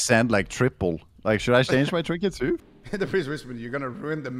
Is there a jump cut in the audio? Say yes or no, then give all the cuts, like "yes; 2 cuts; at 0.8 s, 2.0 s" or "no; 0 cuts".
yes; 1 cut; at 2.6 s